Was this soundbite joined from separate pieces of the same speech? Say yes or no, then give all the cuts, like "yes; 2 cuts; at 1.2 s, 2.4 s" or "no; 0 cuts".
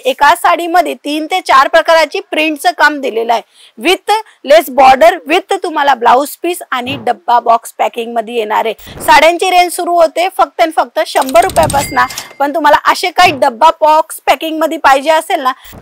no; 0 cuts